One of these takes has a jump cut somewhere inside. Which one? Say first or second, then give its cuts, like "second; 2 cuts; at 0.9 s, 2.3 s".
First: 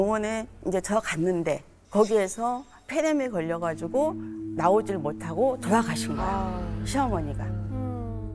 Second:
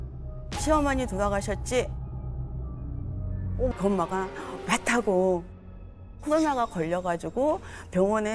second; 1 cut; at 3.7 s